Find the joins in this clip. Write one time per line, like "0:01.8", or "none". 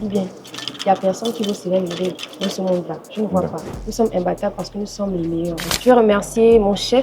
0:03.6
0:05.7